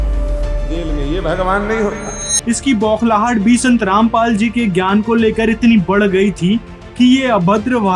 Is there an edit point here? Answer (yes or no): no